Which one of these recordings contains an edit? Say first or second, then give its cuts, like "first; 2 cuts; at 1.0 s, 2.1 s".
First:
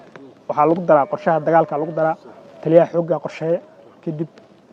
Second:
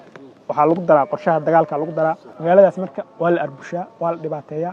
second; 1 cut; at 2.3 s